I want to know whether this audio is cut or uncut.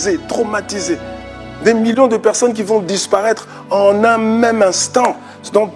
uncut